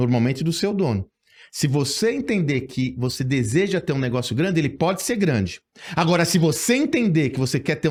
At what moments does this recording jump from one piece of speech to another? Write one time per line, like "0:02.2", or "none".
none